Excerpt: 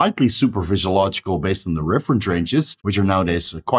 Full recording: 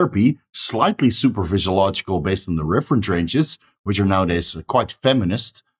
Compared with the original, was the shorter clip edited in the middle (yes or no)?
yes